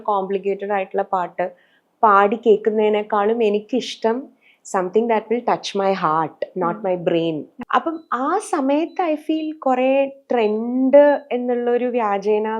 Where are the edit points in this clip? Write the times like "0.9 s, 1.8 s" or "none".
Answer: 7.5 s